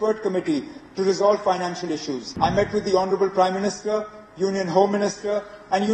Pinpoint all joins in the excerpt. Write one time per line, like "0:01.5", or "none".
0:02.2